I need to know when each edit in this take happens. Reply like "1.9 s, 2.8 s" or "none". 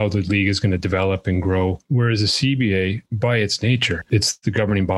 1.8 s, 3.1 s, 4.0 s